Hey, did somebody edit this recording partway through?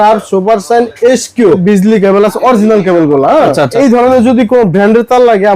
yes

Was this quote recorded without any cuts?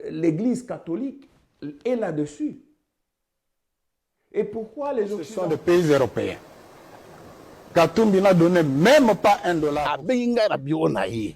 no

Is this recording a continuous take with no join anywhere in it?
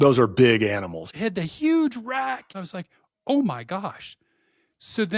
no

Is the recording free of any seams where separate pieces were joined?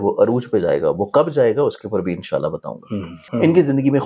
no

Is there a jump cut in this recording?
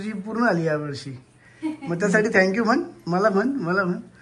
no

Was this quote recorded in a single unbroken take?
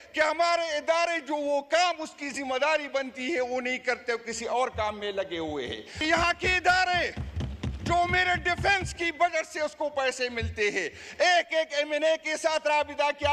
no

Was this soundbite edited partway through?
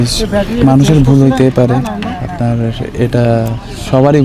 no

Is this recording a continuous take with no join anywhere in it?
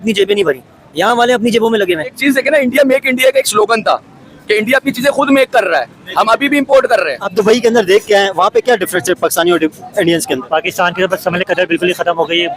no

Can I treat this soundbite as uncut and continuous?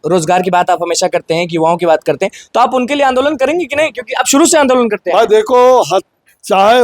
yes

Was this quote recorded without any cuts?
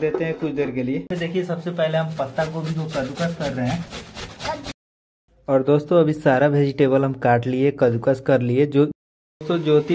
no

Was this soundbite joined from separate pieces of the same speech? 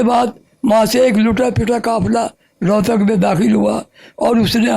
no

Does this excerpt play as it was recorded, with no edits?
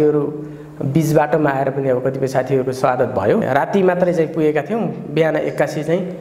no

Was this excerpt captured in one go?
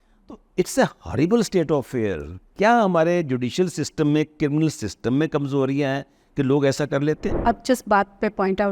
no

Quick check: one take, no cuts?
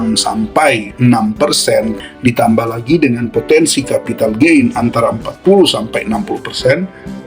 no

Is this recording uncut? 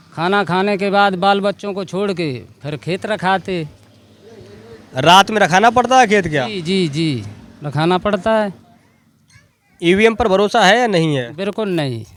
yes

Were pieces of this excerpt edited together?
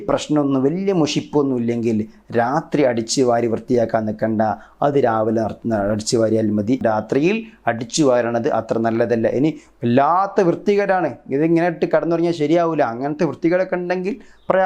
yes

